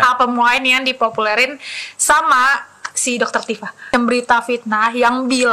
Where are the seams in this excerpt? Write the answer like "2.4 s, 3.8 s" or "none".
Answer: 3.9 s

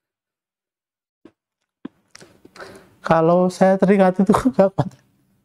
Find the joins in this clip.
none

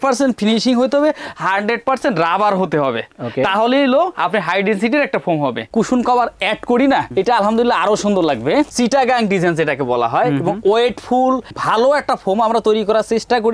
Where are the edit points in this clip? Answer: 5.7 s, 8.7 s

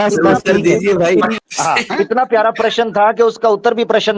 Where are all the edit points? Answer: 1.4 s

